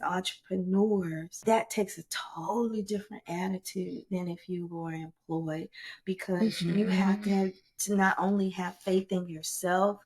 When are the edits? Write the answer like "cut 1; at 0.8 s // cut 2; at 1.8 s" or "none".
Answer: cut 1; at 1.3 s